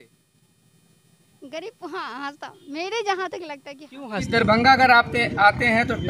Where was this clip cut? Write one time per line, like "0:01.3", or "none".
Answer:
0:04.3